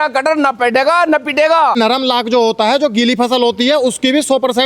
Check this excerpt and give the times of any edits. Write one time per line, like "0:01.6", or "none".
0:01.8